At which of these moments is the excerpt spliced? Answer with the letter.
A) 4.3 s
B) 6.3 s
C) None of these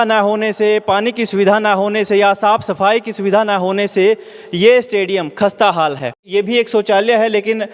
B